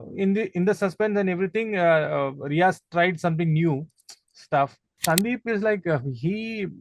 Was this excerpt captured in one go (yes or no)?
no